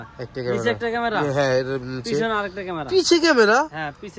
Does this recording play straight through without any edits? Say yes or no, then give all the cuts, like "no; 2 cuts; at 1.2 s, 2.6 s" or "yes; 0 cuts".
yes; 0 cuts